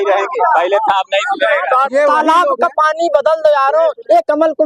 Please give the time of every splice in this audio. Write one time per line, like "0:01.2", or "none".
0:01.9

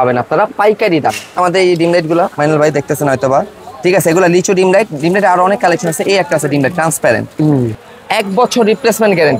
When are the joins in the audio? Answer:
0:01.4
0:07.8

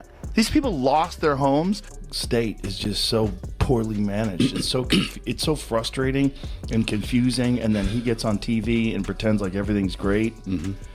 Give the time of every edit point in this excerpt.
0:01.9

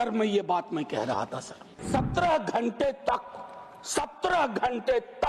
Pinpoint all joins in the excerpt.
0:01.8

